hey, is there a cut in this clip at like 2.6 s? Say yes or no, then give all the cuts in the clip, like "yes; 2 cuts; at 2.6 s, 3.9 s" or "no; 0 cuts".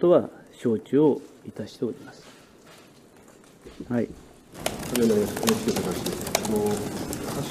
no; 1 cut; at 4.7 s